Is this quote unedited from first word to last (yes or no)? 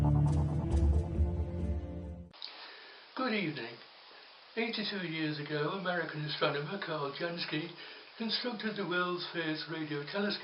yes